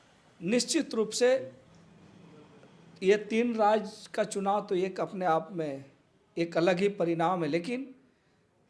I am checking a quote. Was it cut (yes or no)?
no